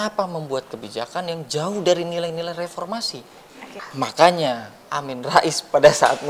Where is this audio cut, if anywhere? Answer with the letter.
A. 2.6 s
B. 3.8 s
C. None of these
B